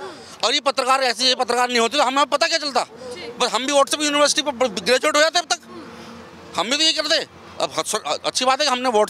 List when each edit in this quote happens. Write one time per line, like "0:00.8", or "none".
none